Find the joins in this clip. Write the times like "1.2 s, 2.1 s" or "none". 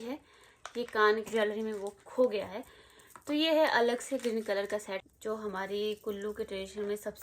1.3 s, 5.1 s